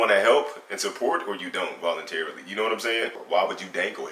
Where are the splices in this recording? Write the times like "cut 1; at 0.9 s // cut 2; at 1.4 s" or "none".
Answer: cut 1; at 3.2 s